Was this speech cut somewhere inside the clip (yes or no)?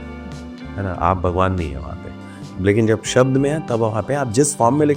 no